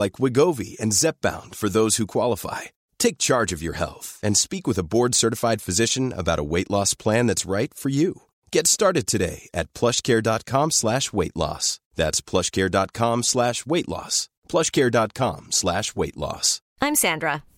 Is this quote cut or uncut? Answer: uncut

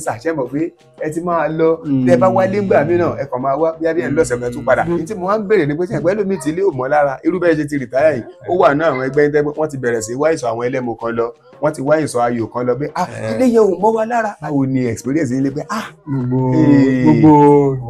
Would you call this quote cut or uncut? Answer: cut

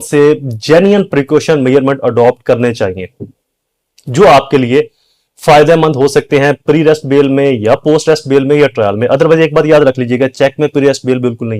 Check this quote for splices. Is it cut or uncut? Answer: uncut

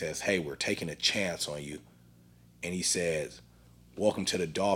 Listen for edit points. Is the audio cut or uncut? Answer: uncut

